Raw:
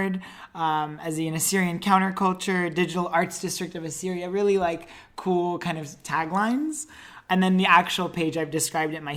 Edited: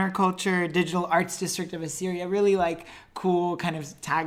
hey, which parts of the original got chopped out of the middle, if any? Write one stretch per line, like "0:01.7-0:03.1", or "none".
none